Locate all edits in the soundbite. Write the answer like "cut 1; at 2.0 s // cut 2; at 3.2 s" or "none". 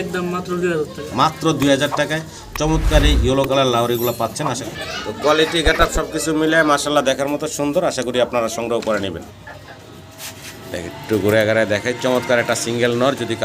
cut 1; at 4.6 s // cut 2; at 9.3 s